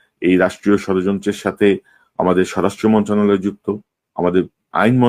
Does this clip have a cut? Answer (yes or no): no